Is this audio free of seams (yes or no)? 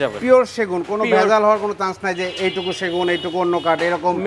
yes